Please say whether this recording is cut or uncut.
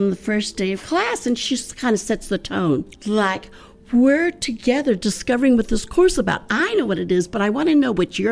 cut